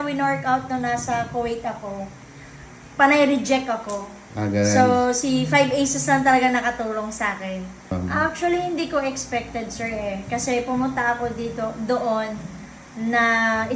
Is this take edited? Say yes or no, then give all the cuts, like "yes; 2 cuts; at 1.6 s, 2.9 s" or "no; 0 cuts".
yes; 1 cut; at 7.9 s